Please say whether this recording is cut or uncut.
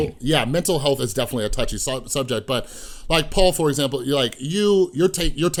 uncut